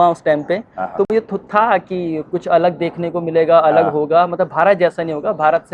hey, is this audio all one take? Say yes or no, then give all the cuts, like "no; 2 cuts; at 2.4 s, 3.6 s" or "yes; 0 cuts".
yes; 0 cuts